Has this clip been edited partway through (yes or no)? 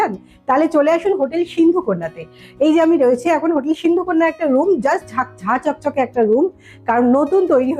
no